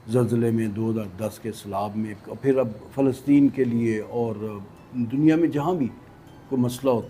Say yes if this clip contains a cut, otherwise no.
no